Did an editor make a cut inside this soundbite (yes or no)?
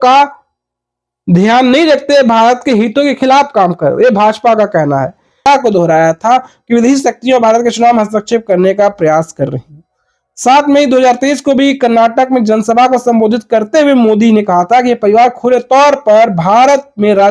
yes